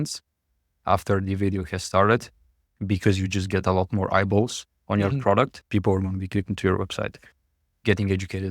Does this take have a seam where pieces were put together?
yes; 1 cut; at 5.6 s

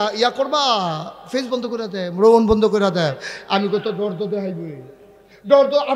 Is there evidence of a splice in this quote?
no; 0 cuts

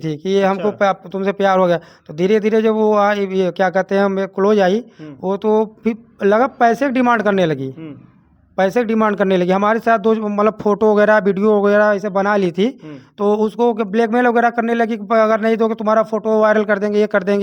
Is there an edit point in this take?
no; 0 cuts

